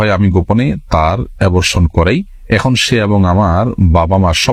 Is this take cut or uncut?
uncut